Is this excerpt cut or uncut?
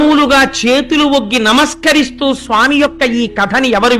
uncut